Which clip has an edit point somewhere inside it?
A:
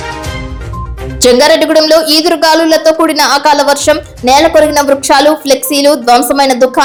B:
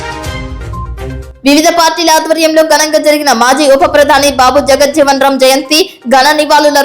B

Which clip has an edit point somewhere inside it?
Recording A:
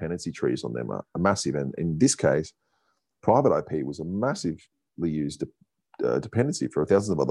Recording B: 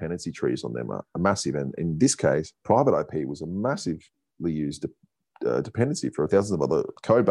B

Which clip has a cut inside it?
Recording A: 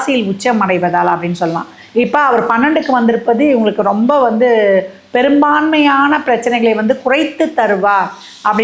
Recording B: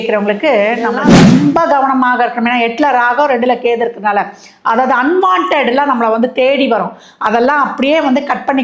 B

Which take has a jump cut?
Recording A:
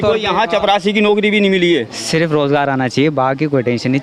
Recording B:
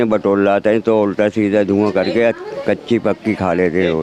A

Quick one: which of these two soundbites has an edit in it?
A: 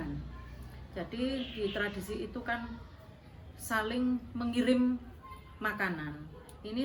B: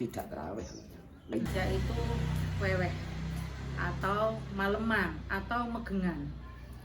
B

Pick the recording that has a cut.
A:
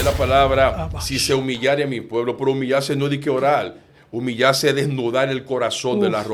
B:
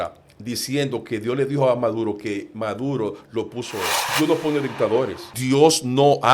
B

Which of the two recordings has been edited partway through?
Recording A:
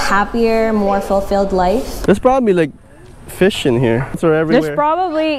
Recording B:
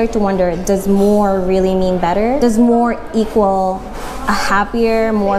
A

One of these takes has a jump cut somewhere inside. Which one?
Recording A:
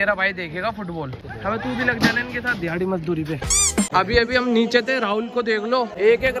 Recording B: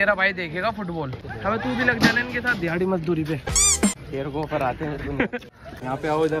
A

